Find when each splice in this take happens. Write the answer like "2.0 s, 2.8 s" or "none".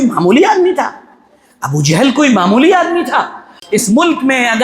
3.6 s